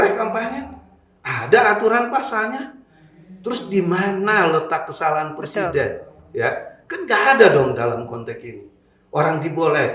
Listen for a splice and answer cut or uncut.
uncut